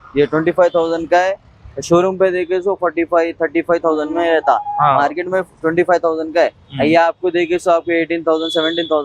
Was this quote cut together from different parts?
no; 0 cuts

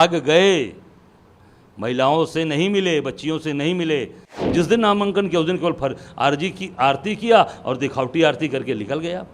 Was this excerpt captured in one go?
no; 1 cut; at 4.2 s

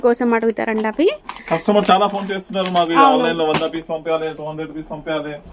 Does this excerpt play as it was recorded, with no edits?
yes; 0 cuts

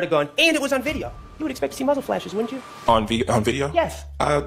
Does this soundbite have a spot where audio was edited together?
no; 0 cuts

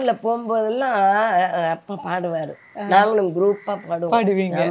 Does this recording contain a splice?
no; 0 cuts

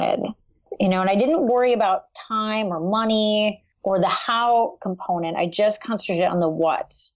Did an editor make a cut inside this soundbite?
no; 0 cuts

